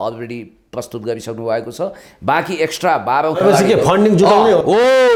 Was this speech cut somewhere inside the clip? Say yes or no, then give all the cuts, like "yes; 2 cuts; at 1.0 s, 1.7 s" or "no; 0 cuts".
no; 0 cuts